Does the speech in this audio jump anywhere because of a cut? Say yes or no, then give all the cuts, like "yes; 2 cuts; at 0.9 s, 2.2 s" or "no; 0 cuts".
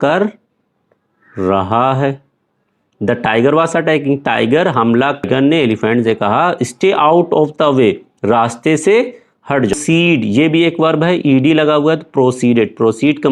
yes; 2 cuts; at 5.2 s, 9.7 s